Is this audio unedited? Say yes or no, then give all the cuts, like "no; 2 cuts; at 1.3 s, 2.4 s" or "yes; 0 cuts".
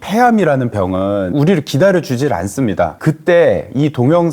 no; 1 cut; at 3.0 s